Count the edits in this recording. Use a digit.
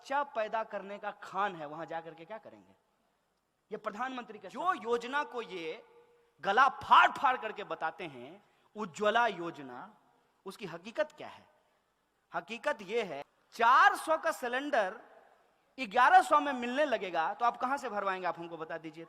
2